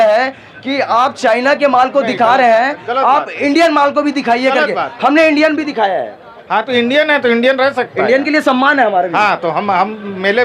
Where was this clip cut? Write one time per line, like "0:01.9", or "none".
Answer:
none